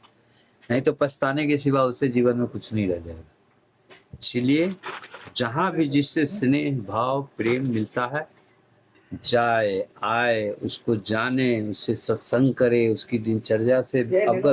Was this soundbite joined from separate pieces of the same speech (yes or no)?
no